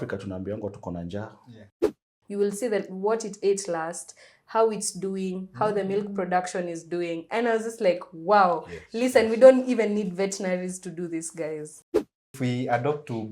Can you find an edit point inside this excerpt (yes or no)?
yes